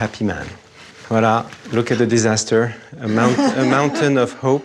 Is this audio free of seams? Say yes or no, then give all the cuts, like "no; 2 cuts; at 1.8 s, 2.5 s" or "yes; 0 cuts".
no; 1 cut; at 0.9 s